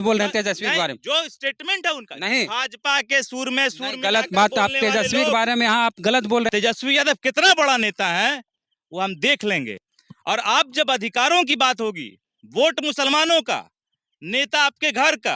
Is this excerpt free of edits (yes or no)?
no